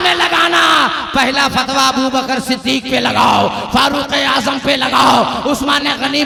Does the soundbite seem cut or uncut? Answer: uncut